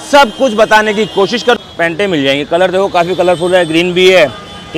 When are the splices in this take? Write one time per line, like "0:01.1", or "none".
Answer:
0:01.6